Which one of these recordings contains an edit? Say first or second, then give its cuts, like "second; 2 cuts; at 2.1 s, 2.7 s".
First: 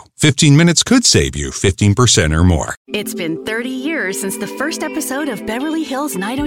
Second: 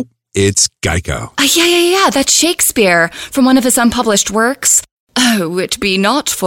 first; 1 cut; at 2.8 s